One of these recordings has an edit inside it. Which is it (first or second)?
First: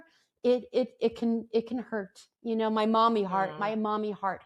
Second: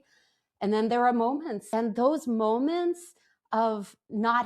second